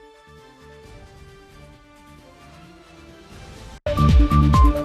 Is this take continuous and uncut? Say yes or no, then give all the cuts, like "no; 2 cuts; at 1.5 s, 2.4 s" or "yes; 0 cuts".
yes; 0 cuts